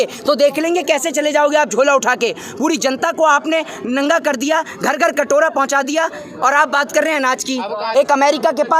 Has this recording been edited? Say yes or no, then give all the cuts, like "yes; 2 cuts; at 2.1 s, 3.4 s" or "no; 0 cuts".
yes; 1 cut; at 7.8 s